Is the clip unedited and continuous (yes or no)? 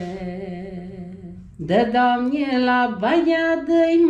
no